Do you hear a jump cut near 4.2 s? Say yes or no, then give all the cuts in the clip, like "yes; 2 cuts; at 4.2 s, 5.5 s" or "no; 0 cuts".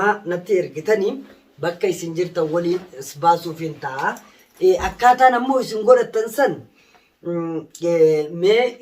no; 0 cuts